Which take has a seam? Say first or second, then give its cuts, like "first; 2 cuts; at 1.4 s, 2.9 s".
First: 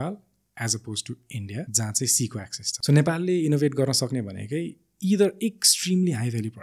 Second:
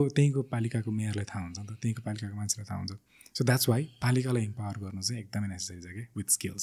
first; 2 cuts; at 1.7 s, 2.6 s